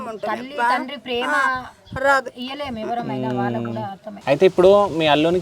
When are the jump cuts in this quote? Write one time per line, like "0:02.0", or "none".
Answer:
0:04.1